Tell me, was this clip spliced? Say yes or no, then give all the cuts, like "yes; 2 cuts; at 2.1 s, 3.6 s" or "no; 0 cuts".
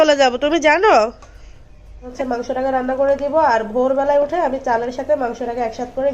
yes; 1 cut; at 2.1 s